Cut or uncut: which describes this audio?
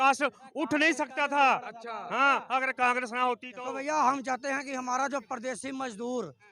cut